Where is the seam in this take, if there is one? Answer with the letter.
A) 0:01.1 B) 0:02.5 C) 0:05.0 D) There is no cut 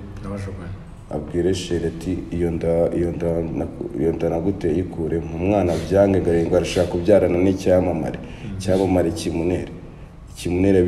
D